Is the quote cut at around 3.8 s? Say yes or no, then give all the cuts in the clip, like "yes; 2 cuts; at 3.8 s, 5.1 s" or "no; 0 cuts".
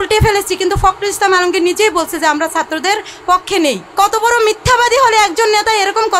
yes; 1 cut; at 3.8 s